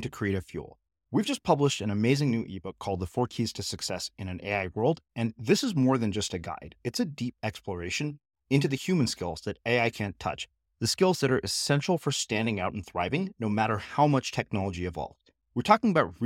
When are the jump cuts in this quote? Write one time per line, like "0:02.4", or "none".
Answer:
none

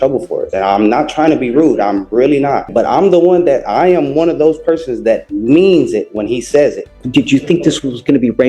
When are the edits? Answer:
0:02.7
0:07.0

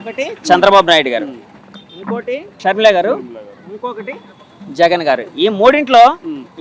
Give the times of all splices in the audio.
0:02.6

